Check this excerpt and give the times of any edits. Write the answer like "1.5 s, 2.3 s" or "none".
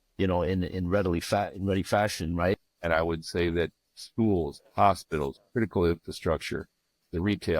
2.7 s